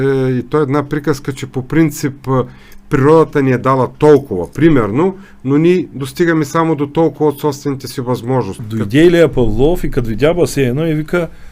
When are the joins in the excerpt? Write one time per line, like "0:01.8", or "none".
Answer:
0:08.6